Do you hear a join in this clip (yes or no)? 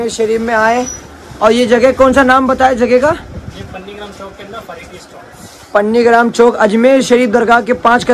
no